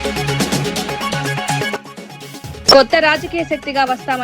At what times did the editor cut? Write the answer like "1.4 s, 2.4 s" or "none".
1.7 s

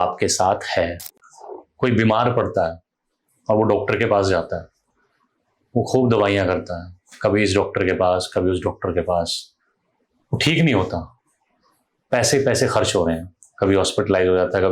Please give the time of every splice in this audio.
1.0 s

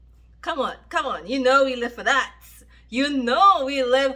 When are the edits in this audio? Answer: none

